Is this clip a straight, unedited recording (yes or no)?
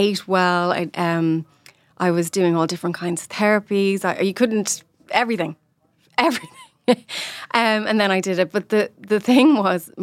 yes